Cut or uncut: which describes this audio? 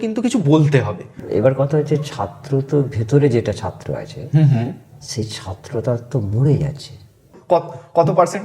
cut